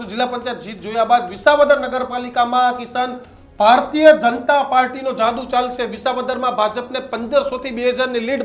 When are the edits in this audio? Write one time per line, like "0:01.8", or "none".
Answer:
none